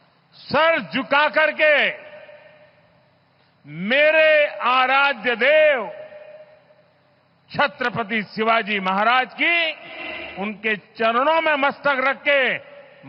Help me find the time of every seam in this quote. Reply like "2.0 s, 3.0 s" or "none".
none